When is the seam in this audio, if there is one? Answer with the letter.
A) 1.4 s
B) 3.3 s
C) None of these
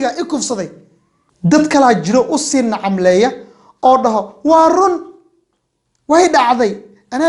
A